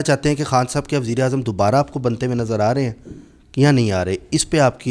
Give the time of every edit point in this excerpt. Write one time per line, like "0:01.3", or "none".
none